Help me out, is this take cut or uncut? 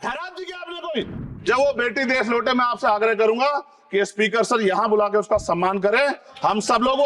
cut